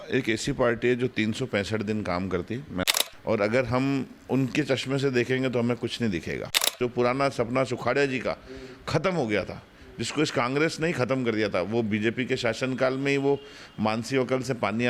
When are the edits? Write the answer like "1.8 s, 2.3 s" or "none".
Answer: 2.8 s, 6.7 s